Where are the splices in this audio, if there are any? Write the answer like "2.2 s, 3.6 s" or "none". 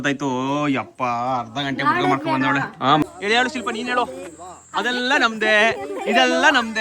3.0 s